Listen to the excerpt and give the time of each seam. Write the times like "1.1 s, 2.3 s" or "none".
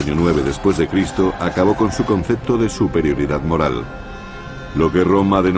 none